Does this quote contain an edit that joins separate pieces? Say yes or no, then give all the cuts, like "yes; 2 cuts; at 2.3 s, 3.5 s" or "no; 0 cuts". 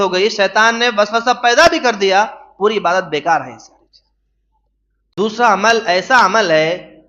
yes; 1 cut; at 5.1 s